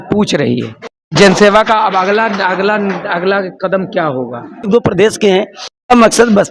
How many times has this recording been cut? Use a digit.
1